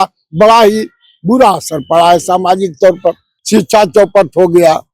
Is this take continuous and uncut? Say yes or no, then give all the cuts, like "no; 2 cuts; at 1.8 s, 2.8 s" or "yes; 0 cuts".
no; 1 cut; at 3.3 s